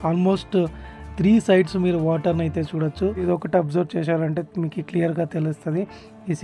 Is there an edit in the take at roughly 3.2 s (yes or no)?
yes